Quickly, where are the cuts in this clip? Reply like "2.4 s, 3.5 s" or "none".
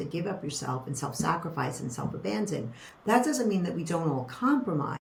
none

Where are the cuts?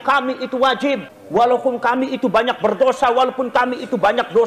1.1 s

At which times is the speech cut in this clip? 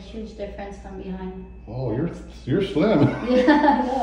none

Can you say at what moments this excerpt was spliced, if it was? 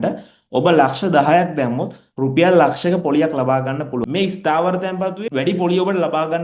4.0 s, 5.2 s

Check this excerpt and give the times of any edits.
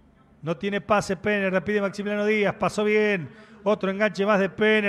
none

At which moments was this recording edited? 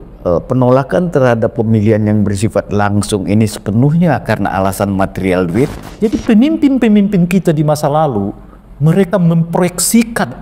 5.8 s

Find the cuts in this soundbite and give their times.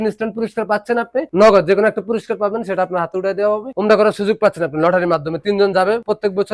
1.3 s, 3.7 s

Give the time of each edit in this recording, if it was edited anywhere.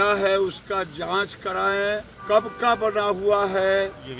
2.1 s

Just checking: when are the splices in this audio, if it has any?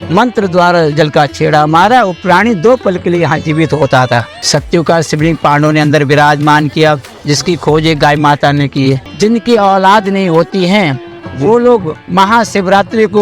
4.4 s, 9.1 s

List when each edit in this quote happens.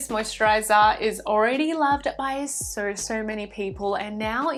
none

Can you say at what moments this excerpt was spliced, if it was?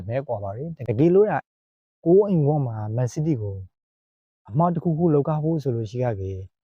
none

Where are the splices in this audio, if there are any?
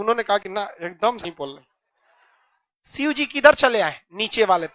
1.2 s

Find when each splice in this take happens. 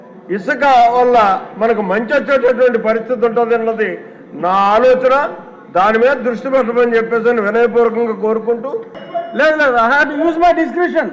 9.0 s

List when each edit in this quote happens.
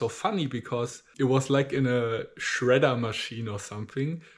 1.0 s

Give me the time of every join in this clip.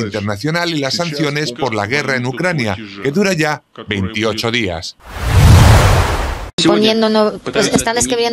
4.9 s, 6.5 s

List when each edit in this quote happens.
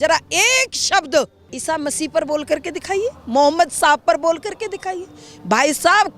1.5 s

